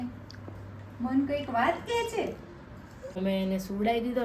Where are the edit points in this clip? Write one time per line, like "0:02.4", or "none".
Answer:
0:03.2